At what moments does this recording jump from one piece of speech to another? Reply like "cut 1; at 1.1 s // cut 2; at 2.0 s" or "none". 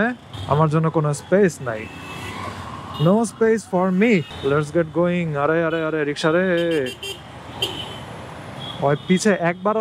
cut 1; at 4.3 s